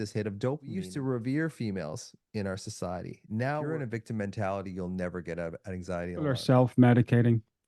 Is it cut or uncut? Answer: cut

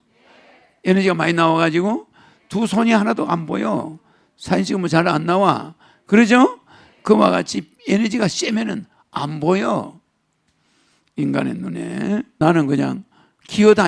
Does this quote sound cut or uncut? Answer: cut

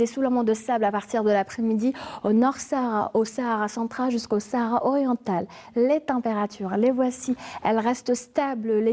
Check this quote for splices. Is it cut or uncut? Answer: uncut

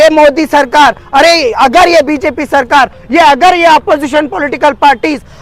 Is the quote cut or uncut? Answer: uncut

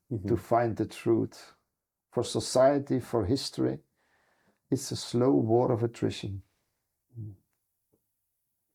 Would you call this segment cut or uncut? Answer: uncut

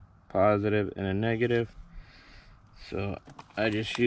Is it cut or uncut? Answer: uncut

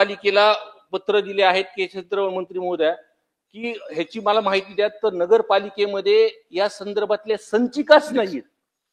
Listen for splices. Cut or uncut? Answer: uncut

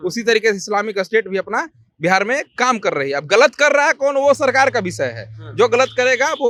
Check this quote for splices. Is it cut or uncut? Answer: uncut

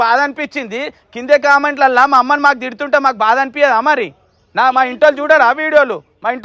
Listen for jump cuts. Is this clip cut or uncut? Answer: uncut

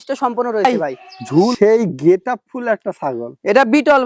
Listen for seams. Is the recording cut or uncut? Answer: cut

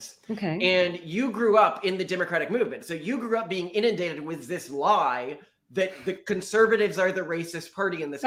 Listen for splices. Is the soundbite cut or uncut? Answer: uncut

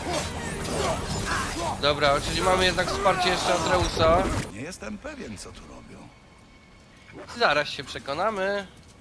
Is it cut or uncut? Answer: cut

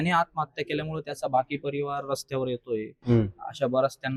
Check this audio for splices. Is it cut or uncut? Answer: uncut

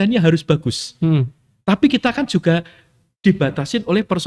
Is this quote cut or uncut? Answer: uncut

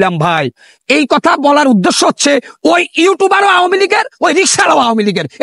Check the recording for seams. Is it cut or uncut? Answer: uncut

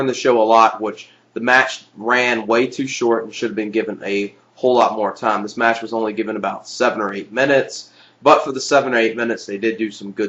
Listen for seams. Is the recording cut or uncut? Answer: uncut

